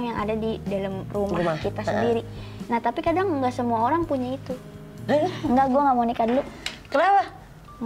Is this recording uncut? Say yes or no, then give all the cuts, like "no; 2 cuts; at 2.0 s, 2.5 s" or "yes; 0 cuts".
no; 1 cut; at 5.1 s